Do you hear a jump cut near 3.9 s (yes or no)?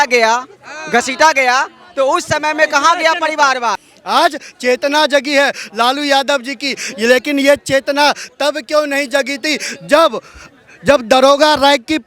yes